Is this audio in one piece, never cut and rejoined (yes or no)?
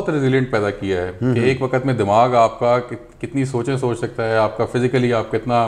yes